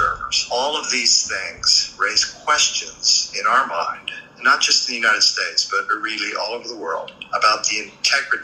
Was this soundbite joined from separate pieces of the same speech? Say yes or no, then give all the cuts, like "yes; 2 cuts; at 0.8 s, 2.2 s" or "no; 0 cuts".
yes; 1 cut; at 1.2 s